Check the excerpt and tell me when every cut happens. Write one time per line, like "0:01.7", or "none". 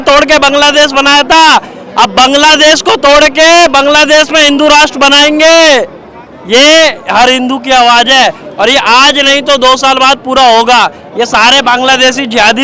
none